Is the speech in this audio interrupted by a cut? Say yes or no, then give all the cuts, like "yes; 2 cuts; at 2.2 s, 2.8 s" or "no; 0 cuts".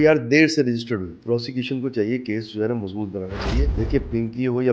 yes; 2 cuts; at 1.2 s, 3.7 s